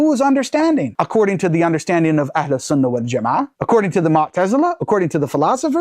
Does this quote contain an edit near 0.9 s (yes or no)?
yes